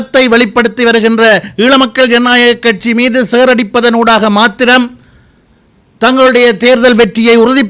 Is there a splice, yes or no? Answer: no